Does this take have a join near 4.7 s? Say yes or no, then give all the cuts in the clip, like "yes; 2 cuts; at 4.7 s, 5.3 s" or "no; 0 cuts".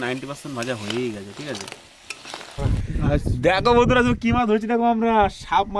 no; 1 cut; at 2.5 s